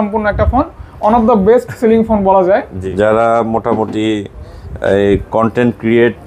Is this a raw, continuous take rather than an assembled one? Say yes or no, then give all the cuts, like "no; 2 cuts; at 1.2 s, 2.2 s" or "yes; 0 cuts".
no; 1 cut; at 2.8 s